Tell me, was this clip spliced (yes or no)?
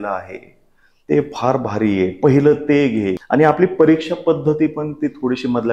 yes